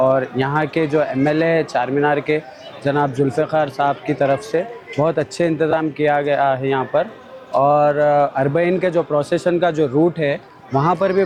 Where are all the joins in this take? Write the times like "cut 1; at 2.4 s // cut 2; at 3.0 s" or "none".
none

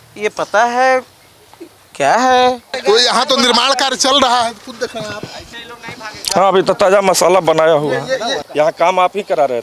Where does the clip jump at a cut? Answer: cut 1; at 2.8 s // cut 2; at 8.4 s

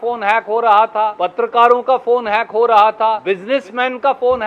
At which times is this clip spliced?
cut 1; at 1.2 s // cut 2; at 3.2 s

